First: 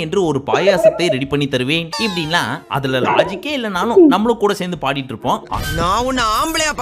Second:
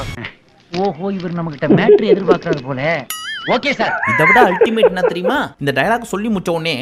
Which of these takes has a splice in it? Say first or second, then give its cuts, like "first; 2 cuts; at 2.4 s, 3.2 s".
first; 1 cut; at 5.5 s